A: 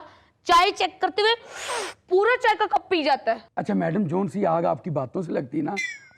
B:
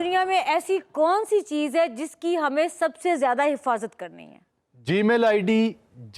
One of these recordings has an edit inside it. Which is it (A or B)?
A